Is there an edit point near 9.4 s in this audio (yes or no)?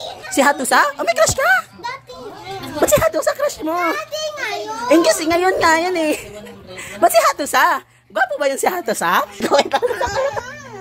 yes